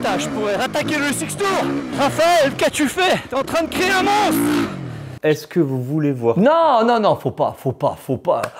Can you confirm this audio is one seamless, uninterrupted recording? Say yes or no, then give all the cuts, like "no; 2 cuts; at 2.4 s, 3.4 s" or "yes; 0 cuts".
no; 3 cuts; at 1.9 s, 3.3 s, 5.1 s